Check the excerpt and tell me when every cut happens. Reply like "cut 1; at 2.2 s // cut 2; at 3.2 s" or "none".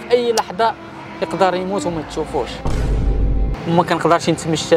cut 1; at 3.0 s